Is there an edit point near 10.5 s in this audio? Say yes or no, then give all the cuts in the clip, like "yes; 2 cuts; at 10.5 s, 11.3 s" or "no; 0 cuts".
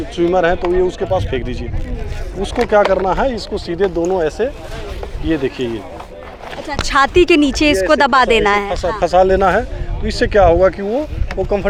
no; 0 cuts